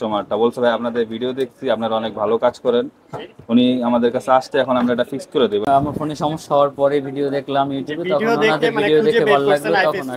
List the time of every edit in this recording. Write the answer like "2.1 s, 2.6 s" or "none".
5.6 s